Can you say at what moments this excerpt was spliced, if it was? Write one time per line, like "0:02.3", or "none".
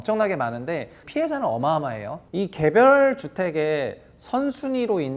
0:01.0
0:02.1